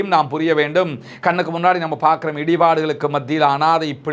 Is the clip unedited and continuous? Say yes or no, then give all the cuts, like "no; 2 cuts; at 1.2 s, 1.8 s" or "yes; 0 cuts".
yes; 0 cuts